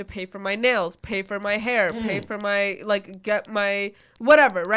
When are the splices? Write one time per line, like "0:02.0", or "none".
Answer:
none